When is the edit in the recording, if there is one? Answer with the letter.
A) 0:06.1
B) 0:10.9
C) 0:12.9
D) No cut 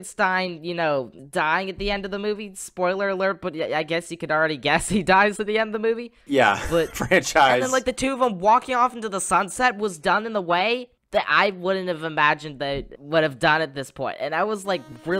A